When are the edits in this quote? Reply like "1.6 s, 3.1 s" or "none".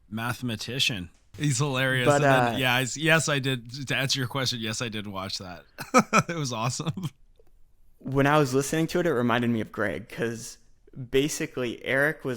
1.3 s